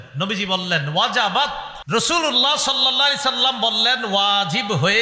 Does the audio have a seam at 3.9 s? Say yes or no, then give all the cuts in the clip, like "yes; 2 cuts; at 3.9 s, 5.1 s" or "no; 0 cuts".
no; 1 cut; at 1.8 s